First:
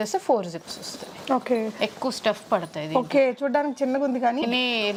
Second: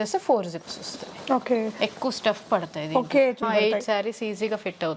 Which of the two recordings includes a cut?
second; 1 cut; at 3.4 s

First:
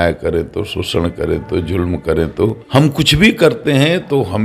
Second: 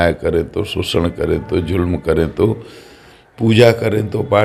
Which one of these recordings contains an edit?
first; 1 cut; at 2.6 s

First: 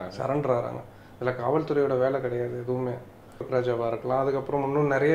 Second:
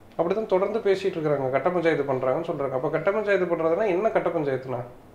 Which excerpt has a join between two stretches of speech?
first; 1 cut; at 3.4 s

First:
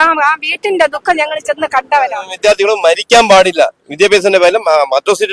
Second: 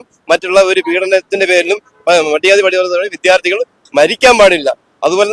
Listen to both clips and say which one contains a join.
first; 1 cut; at 2.3 s

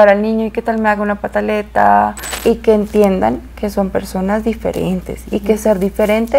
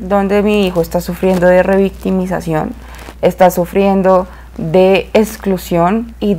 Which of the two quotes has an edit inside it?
first; 1 cut; at 2.3 s

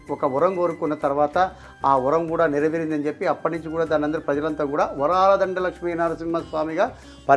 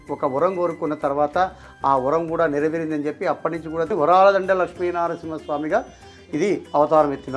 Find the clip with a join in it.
second; 1 cut; at 3.9 s

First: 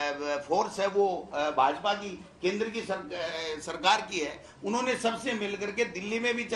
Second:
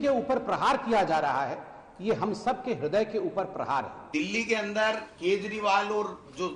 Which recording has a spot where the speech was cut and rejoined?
second; 1 cut; at 4.0 s

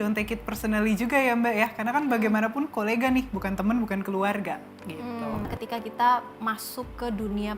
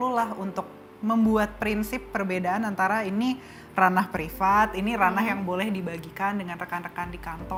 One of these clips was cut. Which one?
first; 1 cut; at 5.5 s

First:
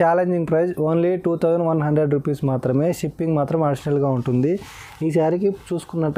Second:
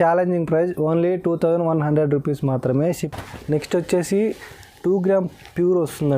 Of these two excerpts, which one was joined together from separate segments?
second; 1 cut; at 3.0 s

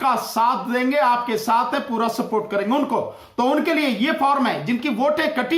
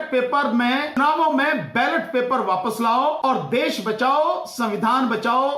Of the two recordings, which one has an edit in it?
second; 2 cuts; at 1.0 s, 3.2 s

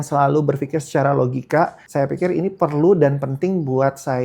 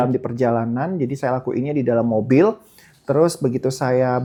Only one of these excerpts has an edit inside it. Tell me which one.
first; 1 cut; at 1.8 s

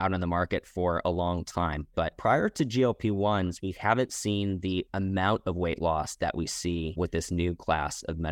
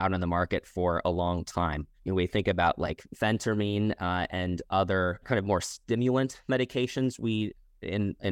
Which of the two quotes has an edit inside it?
first; 2 cuts; at 2.0 s, 6.9 s

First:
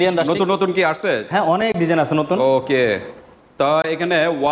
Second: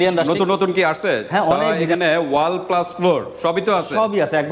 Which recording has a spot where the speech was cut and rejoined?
second; 1 cut; at 1.7 s

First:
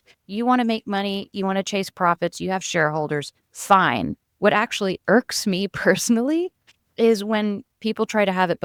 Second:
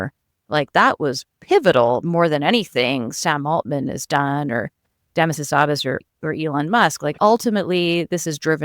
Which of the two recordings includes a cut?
second; 1 cut; at 7.2 s

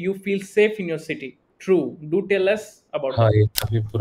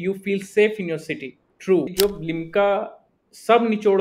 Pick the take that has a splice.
second; 1 cut; at 1.9 s

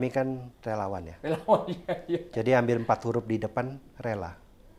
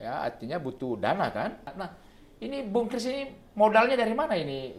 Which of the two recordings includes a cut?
second; 1 cut; at 1.7 s

